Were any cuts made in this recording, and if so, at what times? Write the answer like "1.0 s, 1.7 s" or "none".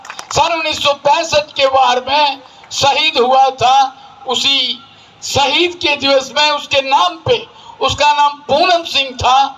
none